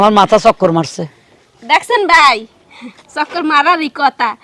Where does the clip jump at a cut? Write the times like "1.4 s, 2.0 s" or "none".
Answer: none

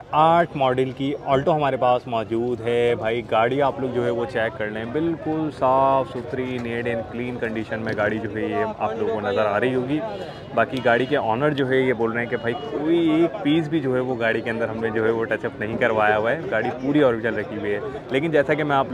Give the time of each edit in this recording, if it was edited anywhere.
none

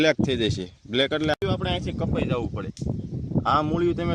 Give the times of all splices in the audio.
1.4 s

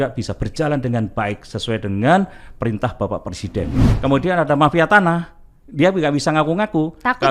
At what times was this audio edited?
3.9 s

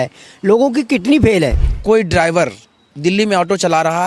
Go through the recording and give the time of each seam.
1.7 s

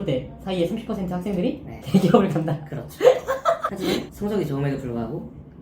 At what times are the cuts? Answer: 1.7 s

